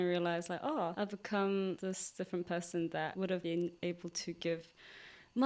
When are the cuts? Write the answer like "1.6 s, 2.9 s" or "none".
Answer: 0.9 s, 1.8 s, 3.3 s